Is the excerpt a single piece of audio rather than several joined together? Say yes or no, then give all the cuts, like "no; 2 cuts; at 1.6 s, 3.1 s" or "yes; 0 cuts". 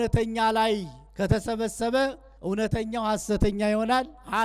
no; 2 cuts; at 1.0 s, 2.3 s